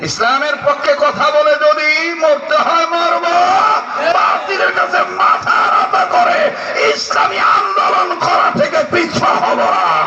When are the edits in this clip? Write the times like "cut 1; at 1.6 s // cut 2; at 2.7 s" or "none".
none